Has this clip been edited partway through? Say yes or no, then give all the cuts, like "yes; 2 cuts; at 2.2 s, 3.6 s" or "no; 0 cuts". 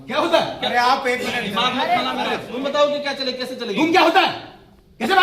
yes; 1 cut; at 2.4 s